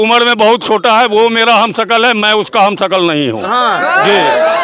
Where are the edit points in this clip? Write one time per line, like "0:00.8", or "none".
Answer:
none

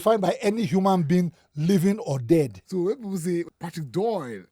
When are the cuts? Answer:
0:02.6
0:03.5

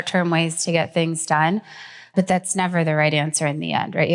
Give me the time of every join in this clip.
0:02.0

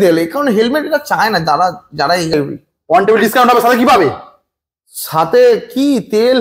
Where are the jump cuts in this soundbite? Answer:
0:02.3

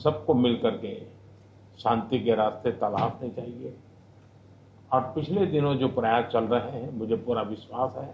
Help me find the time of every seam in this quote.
0:06.7

